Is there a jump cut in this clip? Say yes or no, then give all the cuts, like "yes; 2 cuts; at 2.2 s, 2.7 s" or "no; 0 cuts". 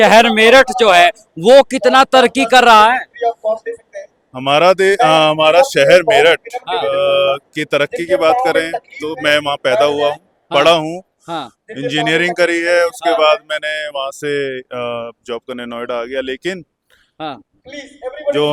no; 0 cuts